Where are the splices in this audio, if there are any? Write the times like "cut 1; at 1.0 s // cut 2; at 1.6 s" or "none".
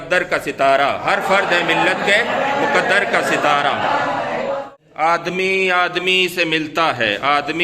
cut 1; at 4.9 s